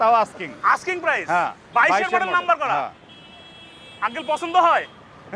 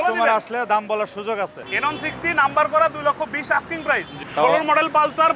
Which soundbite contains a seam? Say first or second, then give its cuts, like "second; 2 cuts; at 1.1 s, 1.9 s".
second; 2 cuts; at 1.6 s, 4.2 s